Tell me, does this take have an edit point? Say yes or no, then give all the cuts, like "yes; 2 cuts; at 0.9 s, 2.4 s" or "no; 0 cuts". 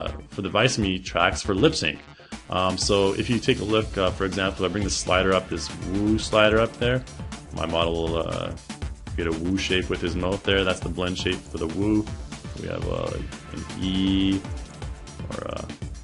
no; 0 cuts